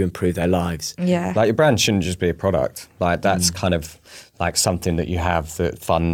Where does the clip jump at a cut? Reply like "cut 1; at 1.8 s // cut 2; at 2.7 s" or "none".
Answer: cut 1; at 1.3 s